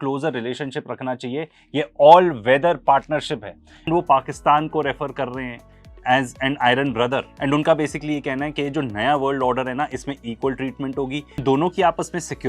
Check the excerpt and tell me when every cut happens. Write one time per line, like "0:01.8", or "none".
0:03.9
0:11.4